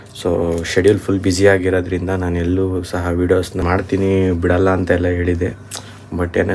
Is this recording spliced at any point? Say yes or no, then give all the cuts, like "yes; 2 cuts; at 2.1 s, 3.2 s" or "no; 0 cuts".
yes; 1 cut; at 3.6 s